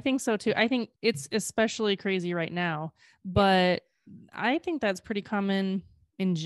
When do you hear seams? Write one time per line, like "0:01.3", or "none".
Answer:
0:00.9